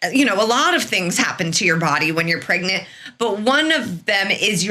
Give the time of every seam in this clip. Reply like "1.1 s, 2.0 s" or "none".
none

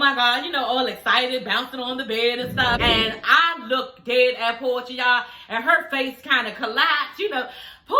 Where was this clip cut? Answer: 2.8 s

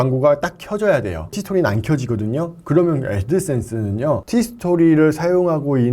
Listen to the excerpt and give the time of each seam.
1.4 s, 4.2 s

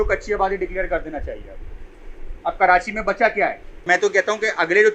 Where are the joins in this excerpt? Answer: 3.8 s

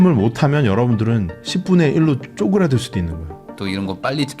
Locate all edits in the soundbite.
3.5 s

